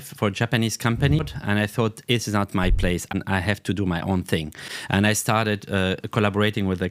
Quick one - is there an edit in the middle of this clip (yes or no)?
yes